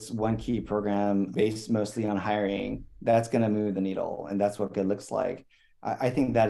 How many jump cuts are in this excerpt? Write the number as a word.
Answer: one